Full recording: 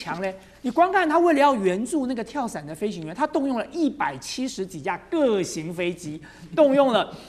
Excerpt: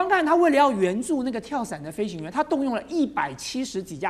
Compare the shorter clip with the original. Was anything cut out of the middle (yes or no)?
no